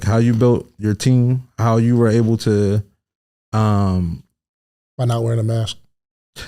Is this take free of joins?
yes; 0 cuts

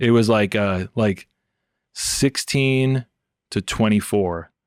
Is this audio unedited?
yes; 0 cuts

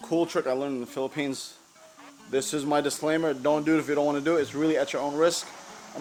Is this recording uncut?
yes; 0 cuts

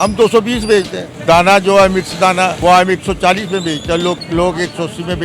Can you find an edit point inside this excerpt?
yes; 3 cuts; at 1.0 s, 2.6 s, 4.2 s

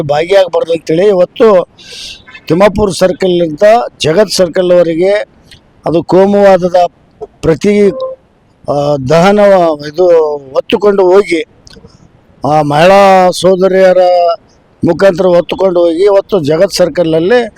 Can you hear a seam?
no; 0 cuts

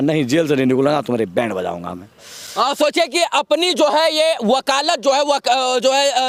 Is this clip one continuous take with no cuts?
yes; 0 cuts

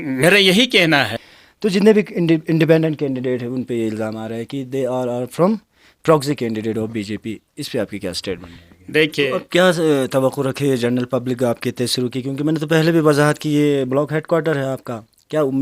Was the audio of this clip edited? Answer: yes; 2 cuts; at 1.2 s, 9.4 s

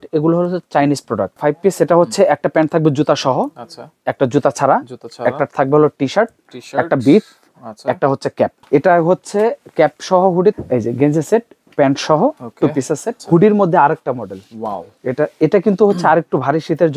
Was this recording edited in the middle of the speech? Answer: yes; 4 cuts; at 1.4 s, 8.6 s, 10.5 s, 13.1 s

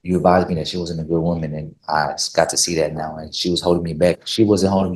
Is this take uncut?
yes; 0 cuts

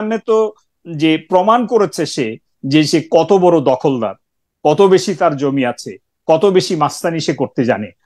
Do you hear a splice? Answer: no; 0 cuts

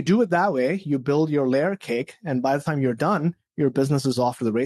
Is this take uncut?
yes; 0 cuts

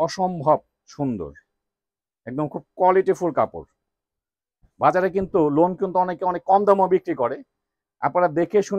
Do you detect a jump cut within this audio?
no; 0 cuts

